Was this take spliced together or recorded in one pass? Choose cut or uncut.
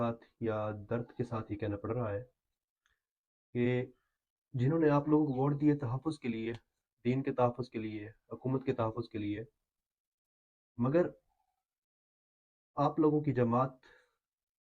uncut